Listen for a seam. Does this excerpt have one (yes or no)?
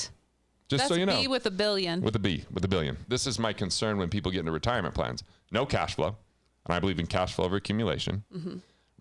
yes